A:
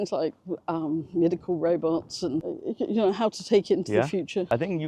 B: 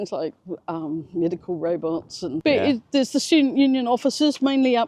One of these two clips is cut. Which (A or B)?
B